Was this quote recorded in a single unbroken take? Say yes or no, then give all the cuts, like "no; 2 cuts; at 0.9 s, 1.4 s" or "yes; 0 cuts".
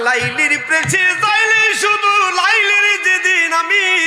yes; 0 cuts